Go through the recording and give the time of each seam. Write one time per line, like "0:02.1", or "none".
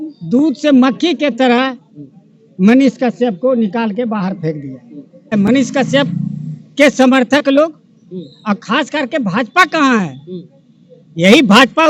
0:05.3